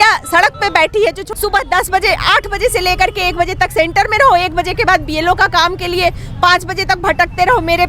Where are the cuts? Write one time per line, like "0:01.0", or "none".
0:01.3

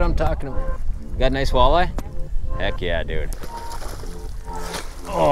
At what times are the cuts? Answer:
0:03.5

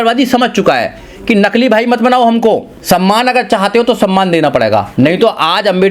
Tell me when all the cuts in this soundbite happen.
0:02.7
0:04.9

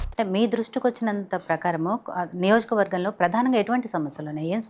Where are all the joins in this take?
none

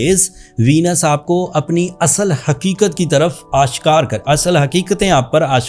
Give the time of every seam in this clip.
none

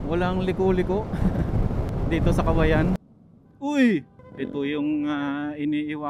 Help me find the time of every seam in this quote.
0:03.0

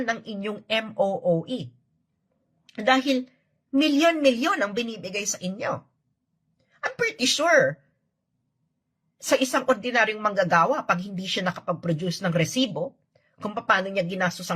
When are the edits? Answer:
0:01.2

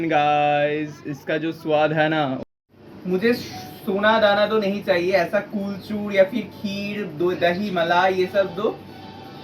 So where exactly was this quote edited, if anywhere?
0:02.4

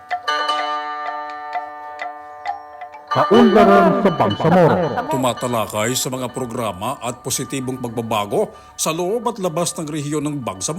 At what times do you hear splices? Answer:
0:03.2

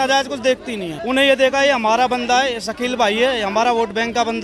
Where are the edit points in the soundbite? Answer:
0:00.9

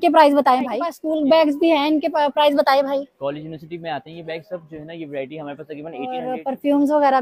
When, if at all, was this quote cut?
0:01.0
0:06.2

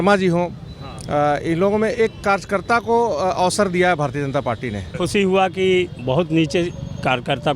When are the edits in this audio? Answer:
0:05.0

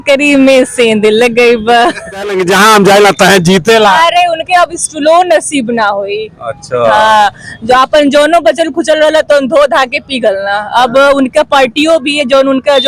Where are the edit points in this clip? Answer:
0:02.4

